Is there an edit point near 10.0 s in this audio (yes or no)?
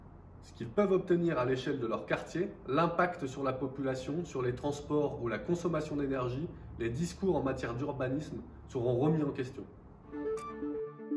yes